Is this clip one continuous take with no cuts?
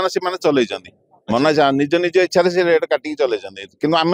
yes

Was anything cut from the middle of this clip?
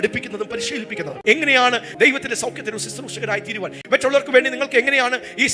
yes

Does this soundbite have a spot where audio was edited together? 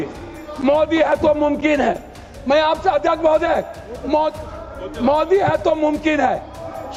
no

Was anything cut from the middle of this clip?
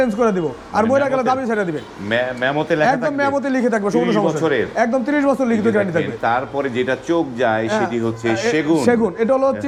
no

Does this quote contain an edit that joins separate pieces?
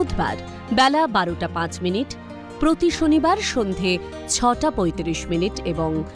no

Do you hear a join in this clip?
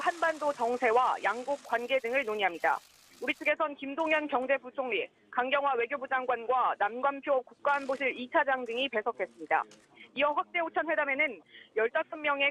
no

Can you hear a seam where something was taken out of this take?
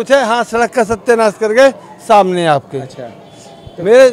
no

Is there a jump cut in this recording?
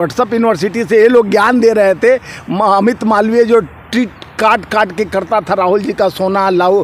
no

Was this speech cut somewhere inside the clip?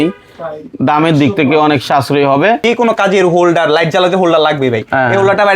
yes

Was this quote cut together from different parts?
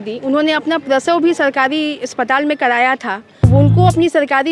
yes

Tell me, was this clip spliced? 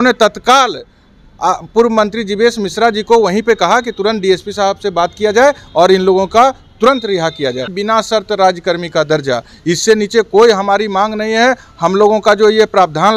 yes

